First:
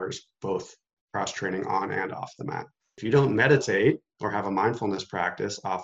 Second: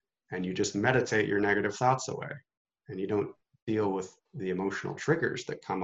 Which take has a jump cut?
first; 2 cuts; at 0.9 s, 2.9 s

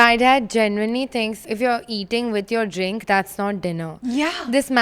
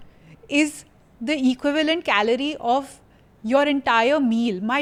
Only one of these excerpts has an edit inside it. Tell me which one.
first; 1 cut; at 1.4 s

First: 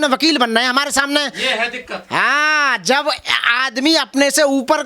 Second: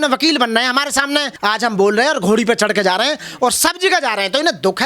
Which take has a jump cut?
second; 1 cut; at 1.3 s

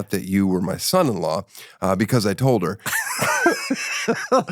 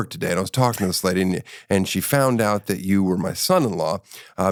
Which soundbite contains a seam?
first; 1 cut; at 3.0 s

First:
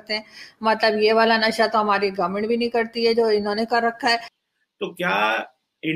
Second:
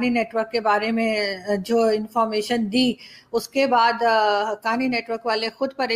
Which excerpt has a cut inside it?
first; 1 cut; at 4.3 s

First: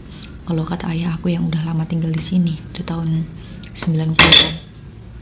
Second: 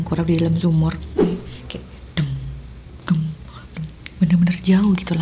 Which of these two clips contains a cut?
second; 1 cut; at 1.1 s

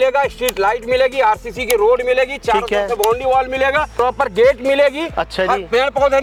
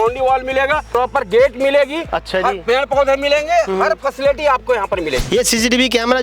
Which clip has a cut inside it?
second; 1 cut; at 5.3 s

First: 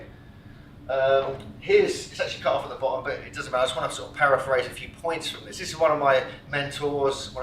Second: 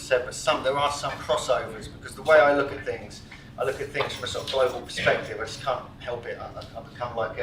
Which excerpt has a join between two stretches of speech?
first; 1 cut; at 1.5 s

